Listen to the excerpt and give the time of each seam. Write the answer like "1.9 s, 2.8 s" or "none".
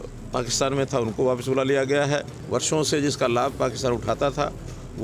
2.4 s

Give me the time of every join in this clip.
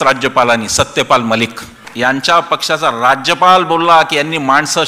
1.9 s

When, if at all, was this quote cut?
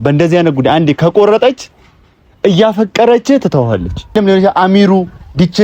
4.1 s

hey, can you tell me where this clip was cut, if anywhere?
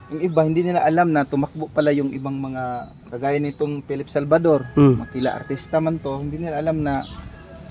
none

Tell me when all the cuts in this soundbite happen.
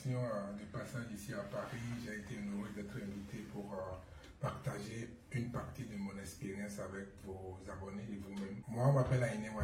8.6 s

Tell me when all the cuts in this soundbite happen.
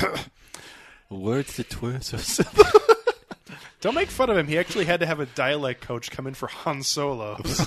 none

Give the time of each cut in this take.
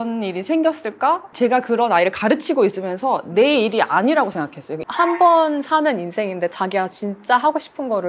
4.8 s

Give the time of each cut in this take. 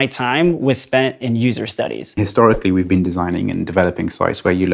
2.2 s

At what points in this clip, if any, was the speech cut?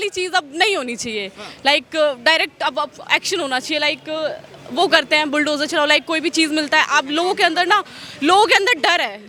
none

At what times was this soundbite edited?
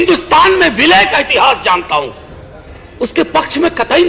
2.8 s

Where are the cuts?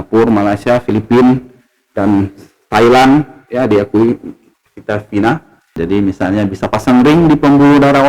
5.8 s

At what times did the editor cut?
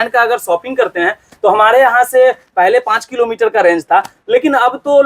none

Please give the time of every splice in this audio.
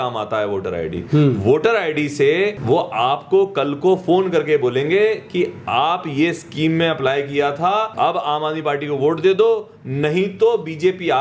2.6 s, 7.9 s

